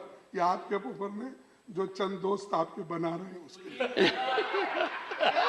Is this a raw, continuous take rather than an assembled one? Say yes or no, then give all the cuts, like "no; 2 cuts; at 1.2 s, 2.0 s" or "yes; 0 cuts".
yes; 0 cuts